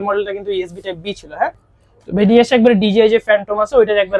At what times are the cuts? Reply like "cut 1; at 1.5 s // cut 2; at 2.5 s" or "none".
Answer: cut 1; at 1.6 s